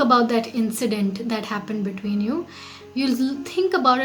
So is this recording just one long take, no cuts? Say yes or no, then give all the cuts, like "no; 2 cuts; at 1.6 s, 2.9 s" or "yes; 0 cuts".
yes; 0 cuts